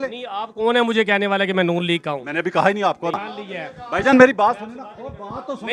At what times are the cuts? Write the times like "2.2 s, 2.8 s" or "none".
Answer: none